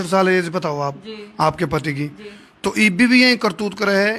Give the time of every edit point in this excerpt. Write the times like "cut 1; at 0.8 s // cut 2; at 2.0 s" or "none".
none